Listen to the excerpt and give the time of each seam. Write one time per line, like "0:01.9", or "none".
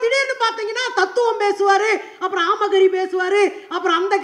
none